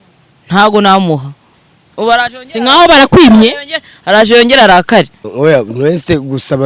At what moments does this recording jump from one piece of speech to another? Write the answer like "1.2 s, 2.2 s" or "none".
5.2 s